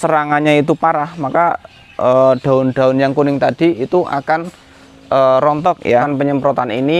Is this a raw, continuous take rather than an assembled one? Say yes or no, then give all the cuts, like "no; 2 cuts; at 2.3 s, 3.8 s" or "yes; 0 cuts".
no; 1 cut; at 6.1 s